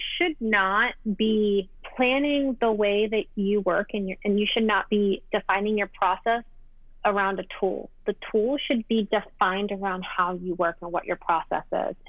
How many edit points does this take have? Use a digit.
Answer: 2